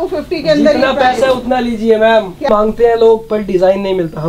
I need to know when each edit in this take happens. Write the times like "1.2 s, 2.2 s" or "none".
2.4 s

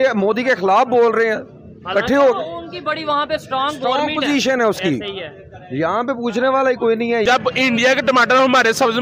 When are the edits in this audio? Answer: 7.2 s

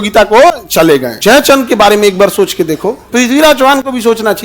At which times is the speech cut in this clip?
1.1 s, 3.0 s

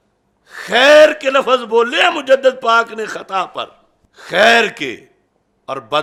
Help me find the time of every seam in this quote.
none

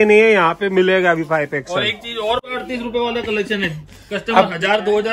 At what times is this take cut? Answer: 2.4 s

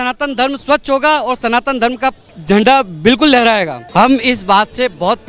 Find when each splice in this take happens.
2.3 s, 3.8 s

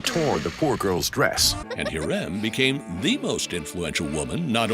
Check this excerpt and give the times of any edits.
1.5 s

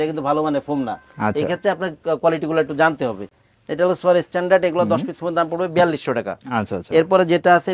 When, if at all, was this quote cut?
none

